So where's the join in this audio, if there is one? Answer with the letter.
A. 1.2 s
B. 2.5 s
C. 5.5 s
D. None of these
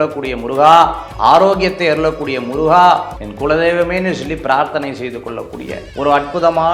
D